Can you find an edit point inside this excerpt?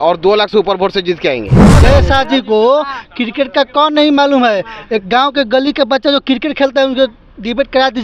yes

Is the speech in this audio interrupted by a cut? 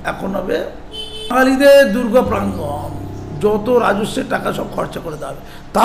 yes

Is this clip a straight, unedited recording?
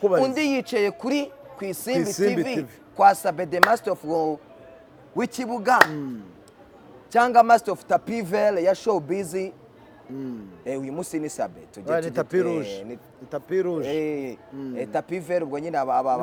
yes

